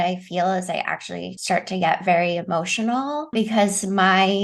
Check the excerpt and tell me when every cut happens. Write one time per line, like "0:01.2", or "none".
0:01.3
0:03.3